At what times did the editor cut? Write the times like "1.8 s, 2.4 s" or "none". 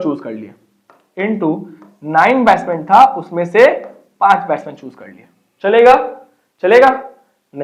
none